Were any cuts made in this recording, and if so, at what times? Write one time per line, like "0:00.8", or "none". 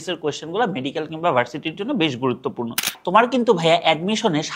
0:02.9